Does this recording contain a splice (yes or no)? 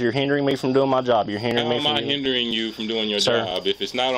no